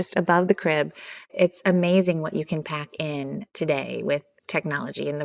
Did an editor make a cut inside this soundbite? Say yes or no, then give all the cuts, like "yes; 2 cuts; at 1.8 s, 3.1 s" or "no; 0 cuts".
yes; 2 cuts; at 1.3 s, 3.5 s